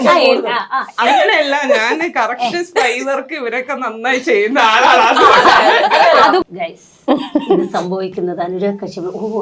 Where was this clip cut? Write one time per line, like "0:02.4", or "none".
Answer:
0:06.4